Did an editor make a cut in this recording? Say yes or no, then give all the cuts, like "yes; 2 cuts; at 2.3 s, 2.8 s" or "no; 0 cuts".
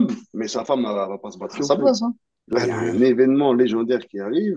yes; 1 cut; at 2.3 s